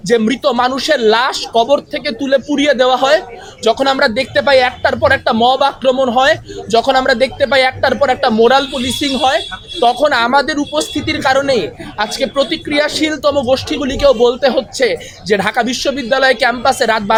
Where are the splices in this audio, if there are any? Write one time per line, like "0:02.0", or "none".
none